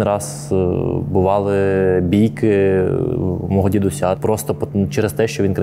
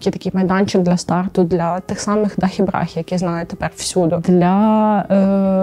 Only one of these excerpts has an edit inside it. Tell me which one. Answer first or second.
first